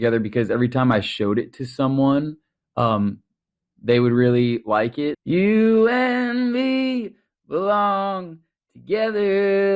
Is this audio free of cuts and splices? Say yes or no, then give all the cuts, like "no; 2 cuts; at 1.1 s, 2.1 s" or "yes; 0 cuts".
no; 1 cut; at 5.2 s